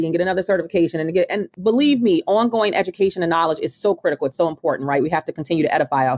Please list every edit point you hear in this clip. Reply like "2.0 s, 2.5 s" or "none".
1.5 s